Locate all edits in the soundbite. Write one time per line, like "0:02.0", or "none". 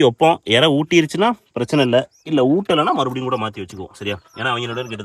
none